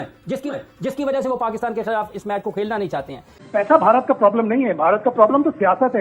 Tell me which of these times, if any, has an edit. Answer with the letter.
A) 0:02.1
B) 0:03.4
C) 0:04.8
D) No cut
B